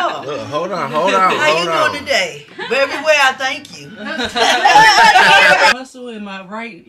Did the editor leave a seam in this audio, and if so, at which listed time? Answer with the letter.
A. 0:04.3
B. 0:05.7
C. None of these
B